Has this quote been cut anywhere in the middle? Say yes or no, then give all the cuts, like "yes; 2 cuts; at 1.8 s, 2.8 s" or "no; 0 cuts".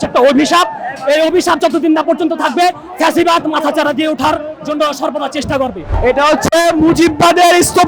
yes; 1 cut; at 5.9 s